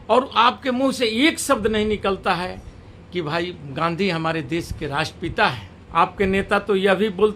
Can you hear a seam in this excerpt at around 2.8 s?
no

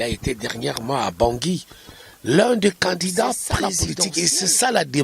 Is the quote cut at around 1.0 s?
no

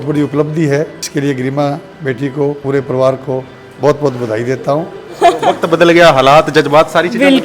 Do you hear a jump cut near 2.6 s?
yes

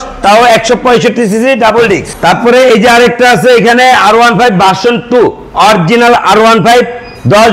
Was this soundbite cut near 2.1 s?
yes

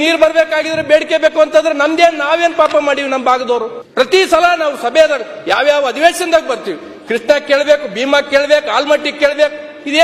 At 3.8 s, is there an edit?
yes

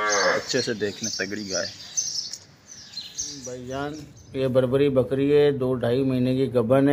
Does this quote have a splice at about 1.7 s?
no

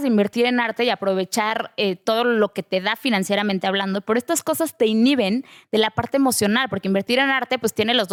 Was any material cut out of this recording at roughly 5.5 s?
no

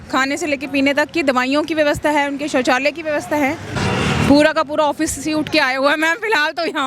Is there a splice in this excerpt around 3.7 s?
yes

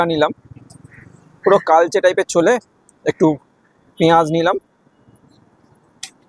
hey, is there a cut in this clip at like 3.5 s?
no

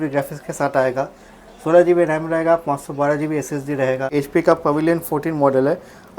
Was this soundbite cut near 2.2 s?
no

